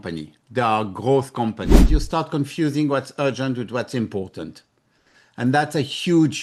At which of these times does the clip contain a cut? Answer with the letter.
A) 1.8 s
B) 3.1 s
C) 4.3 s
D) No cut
A